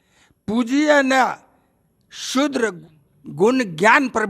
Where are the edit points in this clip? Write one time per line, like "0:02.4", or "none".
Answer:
0:02.8